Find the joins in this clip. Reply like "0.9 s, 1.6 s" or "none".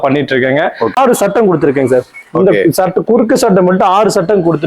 1.0 s